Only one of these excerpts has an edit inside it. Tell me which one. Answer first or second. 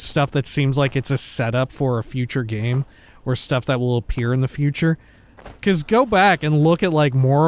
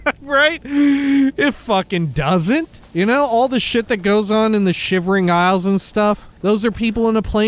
second